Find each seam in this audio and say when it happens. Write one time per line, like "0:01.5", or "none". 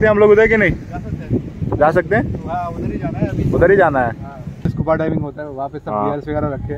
0:04.7